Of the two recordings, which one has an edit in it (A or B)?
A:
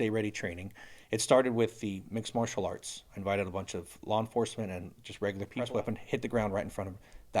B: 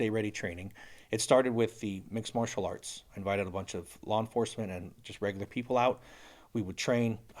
A